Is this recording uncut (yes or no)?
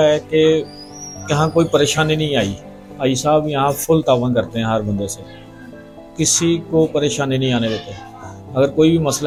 yes